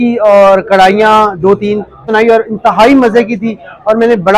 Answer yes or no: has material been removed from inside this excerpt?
yes